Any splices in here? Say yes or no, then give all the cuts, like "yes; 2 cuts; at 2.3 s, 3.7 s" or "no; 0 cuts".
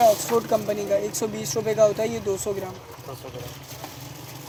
no; 0 cuts